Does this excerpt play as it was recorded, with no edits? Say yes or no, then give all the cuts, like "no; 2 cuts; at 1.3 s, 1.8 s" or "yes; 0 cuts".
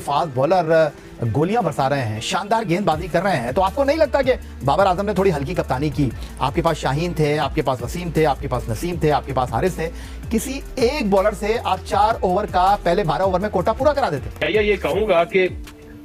yes; 0 cuts